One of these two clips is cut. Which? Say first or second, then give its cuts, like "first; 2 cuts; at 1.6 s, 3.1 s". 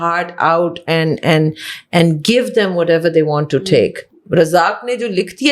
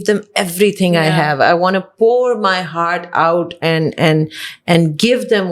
first; 1 cut; at 4.2 s